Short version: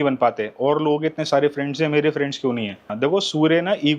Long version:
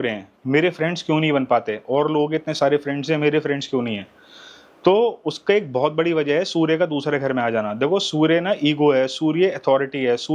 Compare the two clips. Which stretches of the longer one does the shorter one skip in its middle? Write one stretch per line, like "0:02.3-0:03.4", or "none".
0:04.2-0:07.7